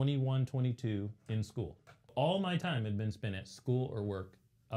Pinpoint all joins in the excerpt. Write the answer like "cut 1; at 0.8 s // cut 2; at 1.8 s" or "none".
cut 1; at 2.1 s